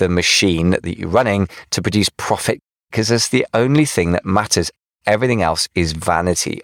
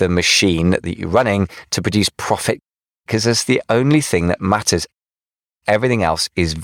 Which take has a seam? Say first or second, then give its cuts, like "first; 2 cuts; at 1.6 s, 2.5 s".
first; 2 cuts; at 2.8 s, 4.8 s